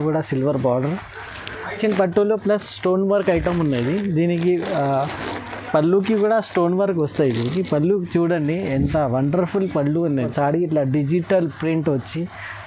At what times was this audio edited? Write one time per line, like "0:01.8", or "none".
0:01.8
0:10.3